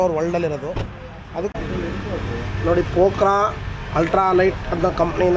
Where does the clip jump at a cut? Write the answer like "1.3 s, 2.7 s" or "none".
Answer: 1.5 s